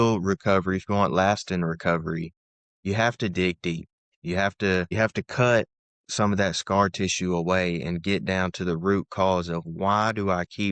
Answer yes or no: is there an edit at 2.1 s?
no